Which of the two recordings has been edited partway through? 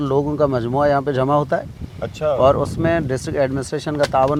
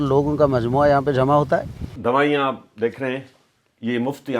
second; 1 cut; at 1.9 s

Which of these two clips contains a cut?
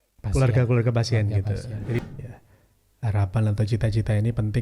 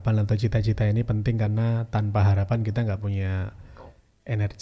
first; 1 cut; at 2.0 s

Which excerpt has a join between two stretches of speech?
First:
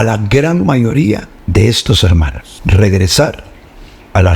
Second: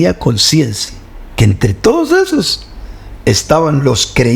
first; 2 cuts; at 1.3 s, 2.4 s

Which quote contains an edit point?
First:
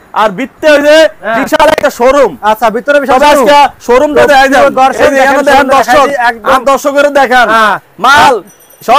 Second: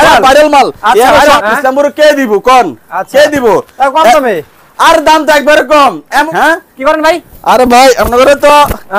second; 2 cuts; at 1.4 s, 6.3 s

